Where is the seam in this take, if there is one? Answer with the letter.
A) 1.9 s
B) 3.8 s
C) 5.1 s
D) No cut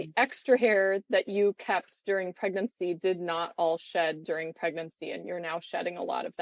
D